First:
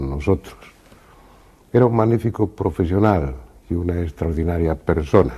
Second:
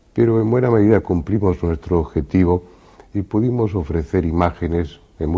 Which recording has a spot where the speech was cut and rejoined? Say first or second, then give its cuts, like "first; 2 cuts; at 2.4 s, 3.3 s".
second; 1 cut; at 1.8 s